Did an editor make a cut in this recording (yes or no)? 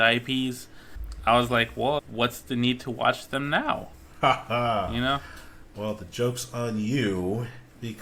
no